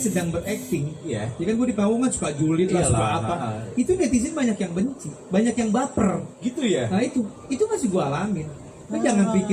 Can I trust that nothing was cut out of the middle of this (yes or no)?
yes